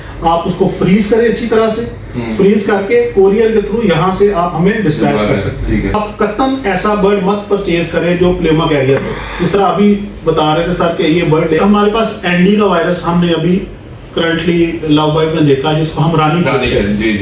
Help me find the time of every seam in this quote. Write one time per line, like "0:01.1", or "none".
0:06.0
0:11.6

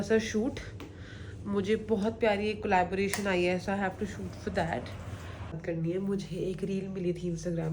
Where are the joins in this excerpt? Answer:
0:05.6

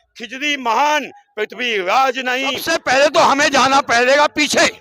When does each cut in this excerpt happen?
0:02.6

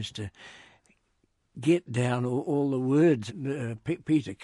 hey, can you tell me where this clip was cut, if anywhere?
0:03.3

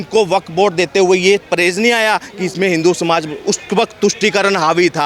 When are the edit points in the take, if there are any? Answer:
none

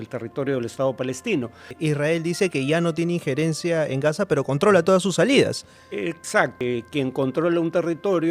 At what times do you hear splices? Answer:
0:01.7
0:06.6

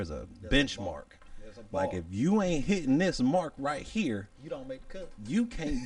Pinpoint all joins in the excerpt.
none

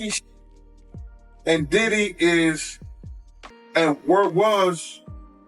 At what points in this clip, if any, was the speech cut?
none

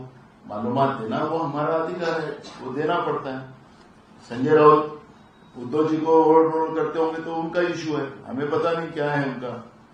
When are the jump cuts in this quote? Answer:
none

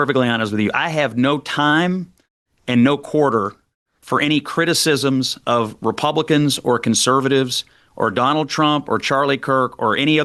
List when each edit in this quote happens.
none

